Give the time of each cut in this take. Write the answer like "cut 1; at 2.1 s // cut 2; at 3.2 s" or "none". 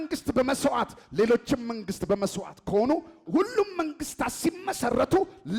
none